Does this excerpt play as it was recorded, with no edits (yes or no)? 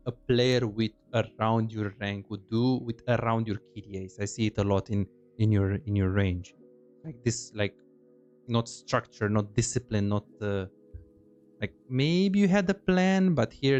yes